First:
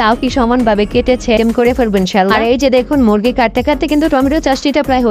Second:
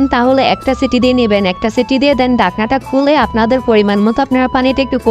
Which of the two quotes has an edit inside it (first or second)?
first